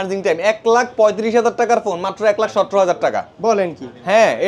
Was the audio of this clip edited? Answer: no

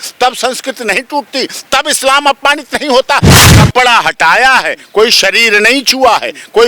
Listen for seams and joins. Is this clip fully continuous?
no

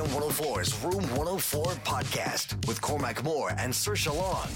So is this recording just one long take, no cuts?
yes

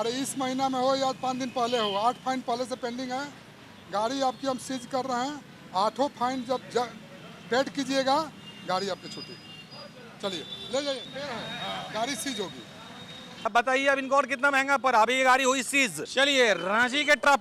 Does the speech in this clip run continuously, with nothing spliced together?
no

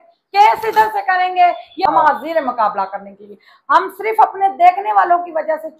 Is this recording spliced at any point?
yes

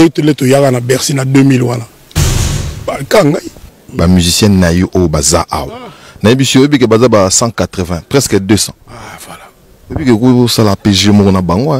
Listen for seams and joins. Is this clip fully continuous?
no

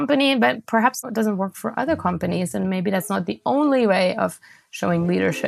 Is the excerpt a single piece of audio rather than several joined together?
no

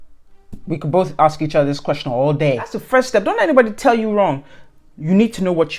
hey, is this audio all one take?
no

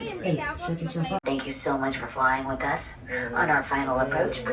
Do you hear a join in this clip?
yes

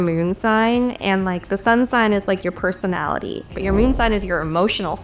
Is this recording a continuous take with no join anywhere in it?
no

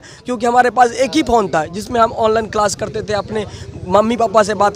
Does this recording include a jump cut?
no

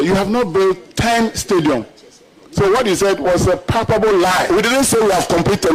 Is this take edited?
no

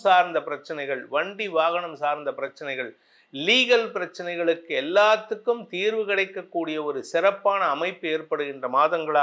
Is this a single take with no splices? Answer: yes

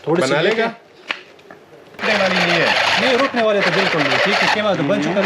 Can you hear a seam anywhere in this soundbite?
yes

